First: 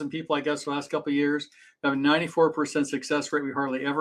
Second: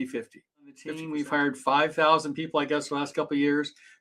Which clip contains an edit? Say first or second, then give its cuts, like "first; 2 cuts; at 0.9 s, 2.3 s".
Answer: second; 1 cut; at 1.0 s